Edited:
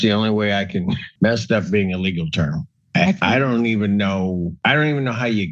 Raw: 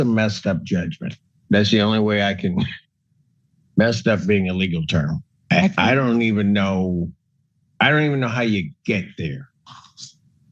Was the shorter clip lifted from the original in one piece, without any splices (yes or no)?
no